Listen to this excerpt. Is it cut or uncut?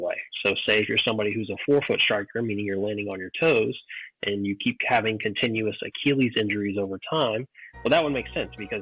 uncut